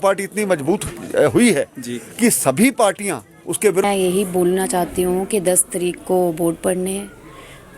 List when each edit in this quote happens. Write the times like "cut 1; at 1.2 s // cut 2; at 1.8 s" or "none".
cut 1; at 3.8 s